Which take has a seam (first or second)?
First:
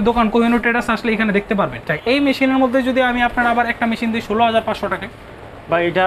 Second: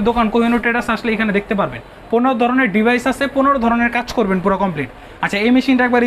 first